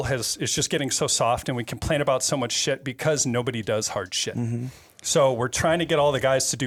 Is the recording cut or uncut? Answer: uncut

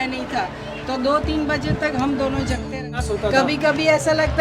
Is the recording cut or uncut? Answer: cut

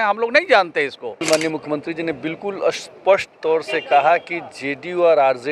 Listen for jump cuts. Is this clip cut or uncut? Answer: cut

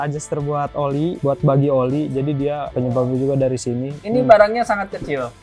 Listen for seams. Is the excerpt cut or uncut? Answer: cut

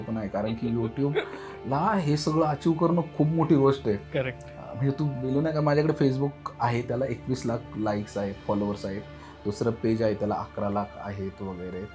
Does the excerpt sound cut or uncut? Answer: uncut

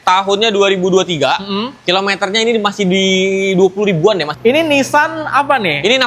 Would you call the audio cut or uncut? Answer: cut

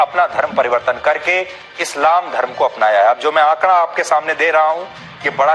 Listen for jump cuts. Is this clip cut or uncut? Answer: uncut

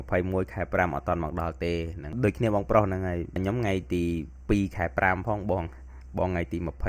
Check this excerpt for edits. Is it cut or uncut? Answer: cut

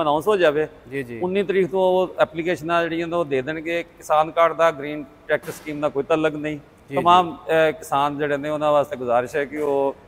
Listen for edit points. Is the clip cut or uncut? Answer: uncut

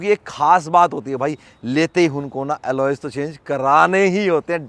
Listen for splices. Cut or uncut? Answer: uncut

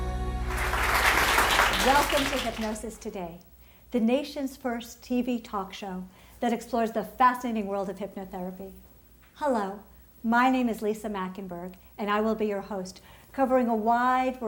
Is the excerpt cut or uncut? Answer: uncut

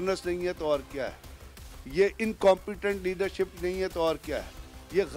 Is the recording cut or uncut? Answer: uncut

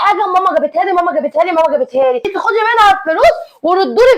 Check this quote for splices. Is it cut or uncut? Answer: cut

